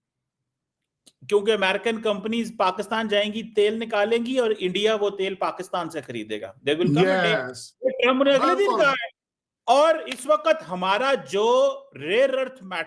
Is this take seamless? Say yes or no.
yes